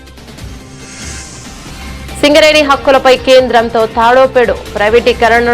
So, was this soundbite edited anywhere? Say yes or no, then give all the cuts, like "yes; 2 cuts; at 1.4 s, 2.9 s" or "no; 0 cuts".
yes; 1 cut; at 2.0 s